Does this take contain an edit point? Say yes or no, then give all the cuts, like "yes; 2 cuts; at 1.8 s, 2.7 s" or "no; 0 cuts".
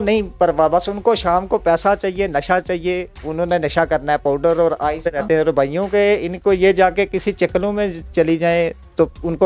yes; 1 cut; at 5.1 s